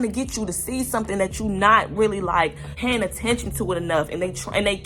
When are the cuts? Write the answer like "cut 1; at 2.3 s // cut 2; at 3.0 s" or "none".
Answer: none